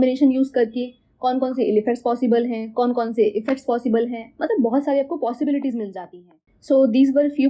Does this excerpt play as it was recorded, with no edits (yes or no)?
no